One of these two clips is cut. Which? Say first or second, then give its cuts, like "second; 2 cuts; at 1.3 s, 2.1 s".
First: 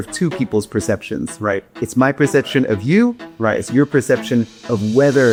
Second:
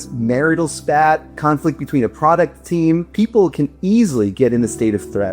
second; 2 cuts; at 1.3 s, 3.1 s